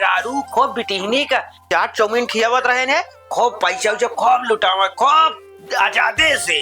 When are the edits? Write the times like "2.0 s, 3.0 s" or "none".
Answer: 1.7 s